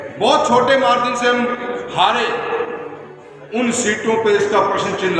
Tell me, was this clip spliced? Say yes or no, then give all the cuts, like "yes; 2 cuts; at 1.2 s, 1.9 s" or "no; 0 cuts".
no; 0 cuts